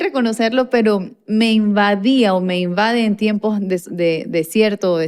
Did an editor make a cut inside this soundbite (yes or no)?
no